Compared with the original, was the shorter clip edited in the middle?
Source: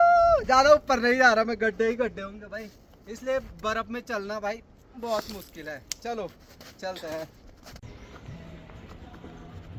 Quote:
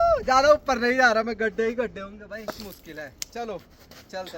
yes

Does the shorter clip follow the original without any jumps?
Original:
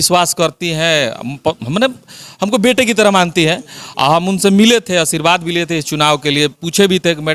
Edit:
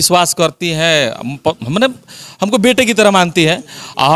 yes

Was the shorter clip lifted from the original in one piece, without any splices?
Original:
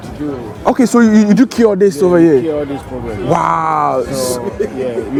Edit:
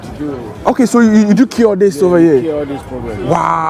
yes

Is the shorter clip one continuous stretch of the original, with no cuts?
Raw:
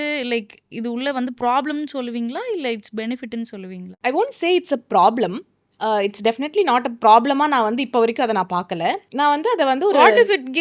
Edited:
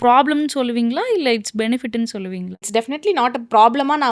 no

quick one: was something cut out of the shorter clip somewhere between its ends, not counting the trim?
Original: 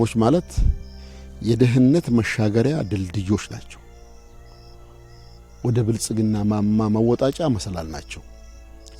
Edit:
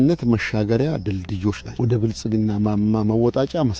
yes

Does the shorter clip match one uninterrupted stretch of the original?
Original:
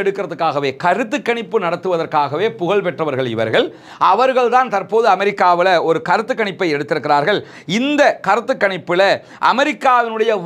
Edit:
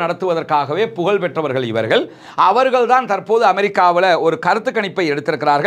yes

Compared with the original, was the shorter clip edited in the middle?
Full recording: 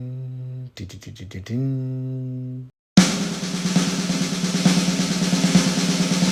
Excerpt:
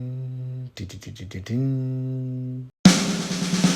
yes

